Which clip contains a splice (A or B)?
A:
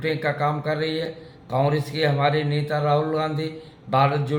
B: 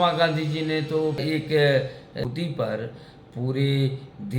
B